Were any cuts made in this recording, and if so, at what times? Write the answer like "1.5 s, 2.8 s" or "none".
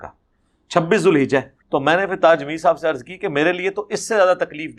1.6 s

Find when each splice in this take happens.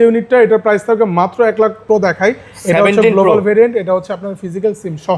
1.8 s

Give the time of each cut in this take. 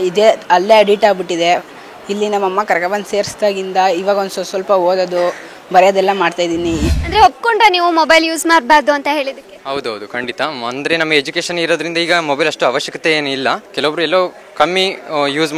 6.9 s, 13.7 s

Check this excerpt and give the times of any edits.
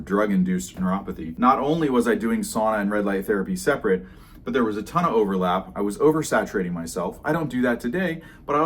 1.2 s

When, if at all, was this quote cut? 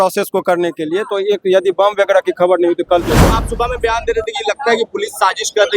3.3 s

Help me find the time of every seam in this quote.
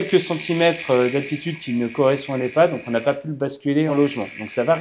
3.9 s

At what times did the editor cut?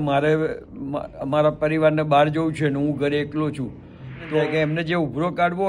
4.3 s

